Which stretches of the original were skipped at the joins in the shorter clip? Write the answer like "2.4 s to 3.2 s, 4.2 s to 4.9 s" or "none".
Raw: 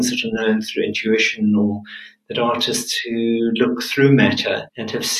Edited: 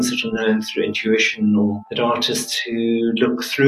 1.8 s to 2.2 s